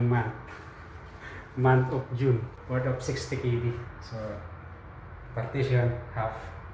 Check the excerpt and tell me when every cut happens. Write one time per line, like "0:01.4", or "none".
0:02.5